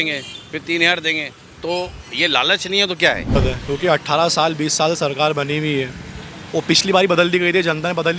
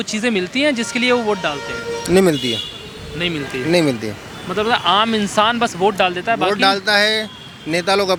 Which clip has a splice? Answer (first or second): first